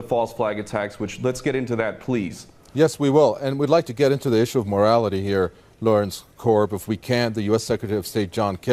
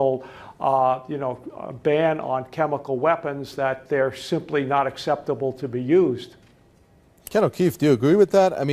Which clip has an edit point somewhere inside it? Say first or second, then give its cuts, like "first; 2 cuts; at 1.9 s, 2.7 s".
second; 1 cut; at 3.2 s